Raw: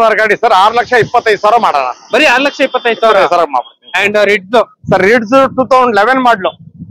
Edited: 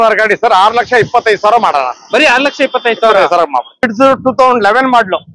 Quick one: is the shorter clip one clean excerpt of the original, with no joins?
no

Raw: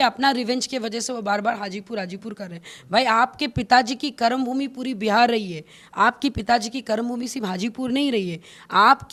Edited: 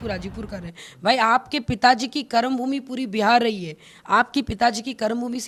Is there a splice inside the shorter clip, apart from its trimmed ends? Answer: no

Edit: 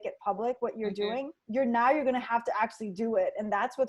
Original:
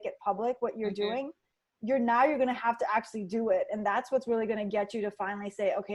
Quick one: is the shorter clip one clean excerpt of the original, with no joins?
no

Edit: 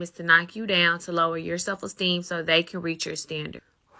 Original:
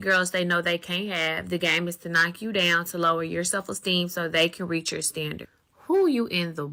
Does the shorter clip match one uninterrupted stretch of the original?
yes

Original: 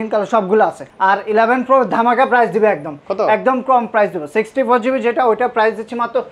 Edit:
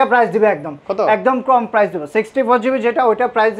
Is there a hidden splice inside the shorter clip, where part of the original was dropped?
no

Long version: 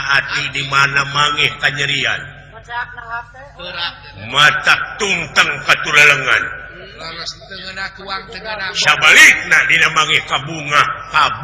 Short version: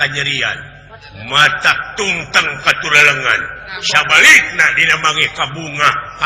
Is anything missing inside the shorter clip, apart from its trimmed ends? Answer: yes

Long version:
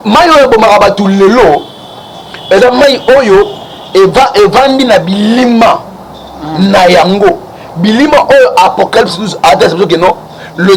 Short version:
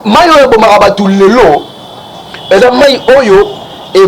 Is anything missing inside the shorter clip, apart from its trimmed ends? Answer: no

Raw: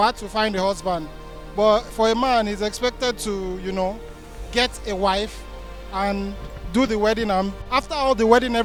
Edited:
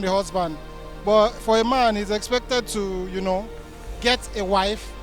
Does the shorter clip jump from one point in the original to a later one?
no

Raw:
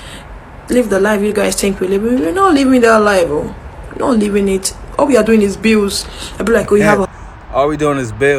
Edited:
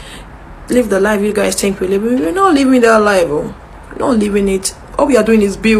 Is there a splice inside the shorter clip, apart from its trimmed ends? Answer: no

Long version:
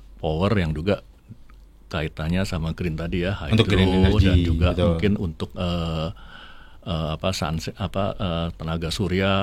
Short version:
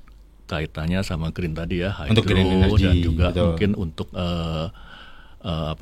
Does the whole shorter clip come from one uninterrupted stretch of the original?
yes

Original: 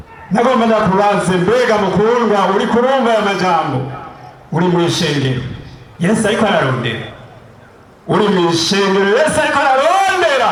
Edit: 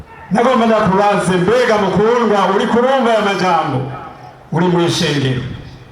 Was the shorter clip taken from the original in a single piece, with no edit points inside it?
yes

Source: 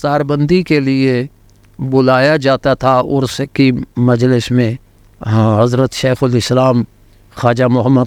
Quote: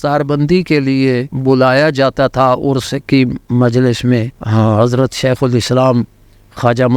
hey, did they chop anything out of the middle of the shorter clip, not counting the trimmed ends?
yes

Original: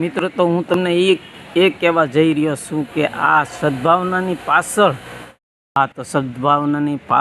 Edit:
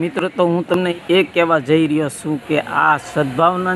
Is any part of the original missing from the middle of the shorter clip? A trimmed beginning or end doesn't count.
yes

